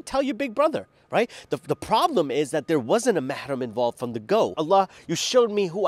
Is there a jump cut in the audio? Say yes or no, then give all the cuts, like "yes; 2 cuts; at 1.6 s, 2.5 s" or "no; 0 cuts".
yes; 1 cut; at 4.6 s